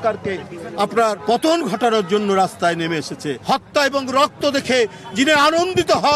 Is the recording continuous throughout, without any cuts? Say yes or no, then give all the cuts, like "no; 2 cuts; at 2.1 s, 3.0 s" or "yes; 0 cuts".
no; 2 cuts; at 1.2 s, 3.3 s